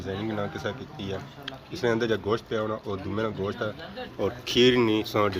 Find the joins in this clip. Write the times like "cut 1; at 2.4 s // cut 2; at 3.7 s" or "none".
cut 1; at 4.1 s